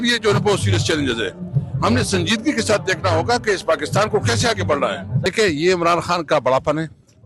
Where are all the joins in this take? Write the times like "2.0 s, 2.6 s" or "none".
5.2 s